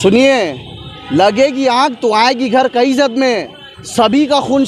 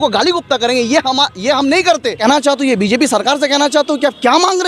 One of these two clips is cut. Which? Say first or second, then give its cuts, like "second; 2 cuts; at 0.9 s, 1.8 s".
second; 1 cut; at 2.2 s